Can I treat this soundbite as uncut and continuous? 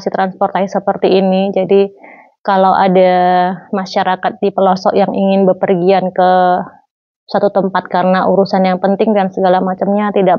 yes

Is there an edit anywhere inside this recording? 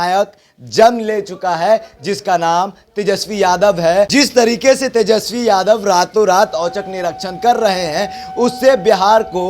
yes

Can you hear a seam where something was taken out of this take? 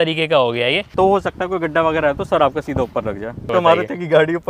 yes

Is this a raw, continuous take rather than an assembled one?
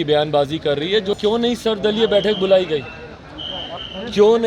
no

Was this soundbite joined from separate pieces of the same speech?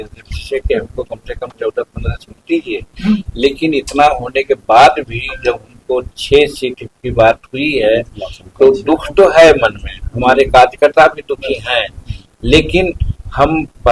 no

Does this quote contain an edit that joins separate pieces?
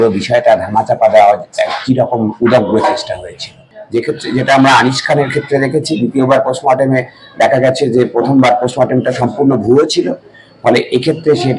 yes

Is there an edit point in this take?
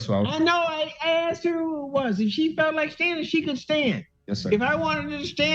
no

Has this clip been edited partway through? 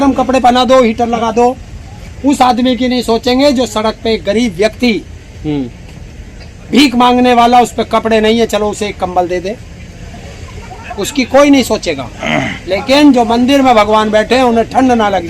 no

